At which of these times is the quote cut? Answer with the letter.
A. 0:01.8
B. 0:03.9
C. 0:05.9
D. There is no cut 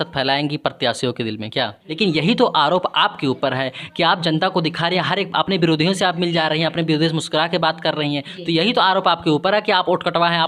A